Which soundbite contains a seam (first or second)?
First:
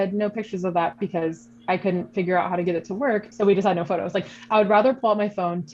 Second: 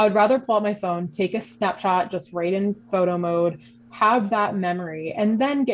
first